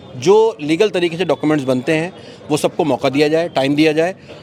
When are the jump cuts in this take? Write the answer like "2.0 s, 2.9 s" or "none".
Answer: none